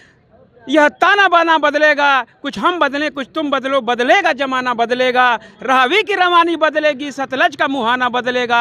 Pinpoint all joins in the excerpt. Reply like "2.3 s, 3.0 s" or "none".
none